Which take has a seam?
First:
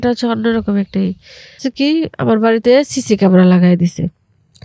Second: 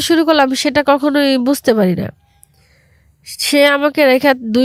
first; 1 cut; at 1.6 s

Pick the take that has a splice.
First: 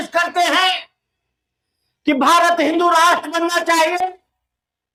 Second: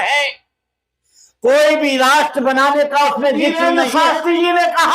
second; 1 cut; at 3.5 s

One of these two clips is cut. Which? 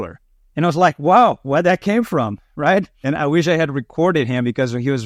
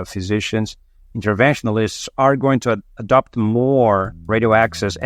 second; 1 cut; at 4.1 s

